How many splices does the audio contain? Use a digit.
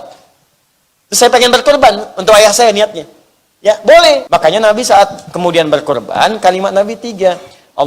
1